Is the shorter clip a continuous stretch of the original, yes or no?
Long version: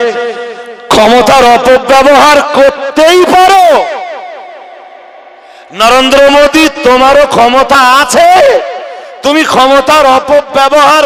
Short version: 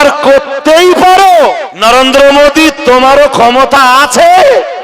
no